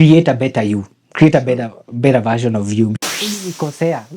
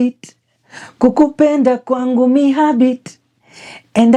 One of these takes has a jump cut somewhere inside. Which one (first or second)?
first